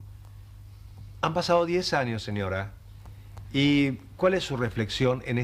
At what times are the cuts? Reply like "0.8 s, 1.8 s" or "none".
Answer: none